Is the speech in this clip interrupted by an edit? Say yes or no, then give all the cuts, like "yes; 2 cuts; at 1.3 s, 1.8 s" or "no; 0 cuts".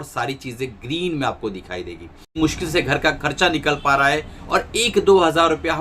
yes; 1 cut; at 2.4 s